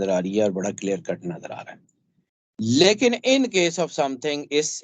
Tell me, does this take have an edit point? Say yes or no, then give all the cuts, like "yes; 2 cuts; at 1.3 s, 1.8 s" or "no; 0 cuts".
no; 0 cuts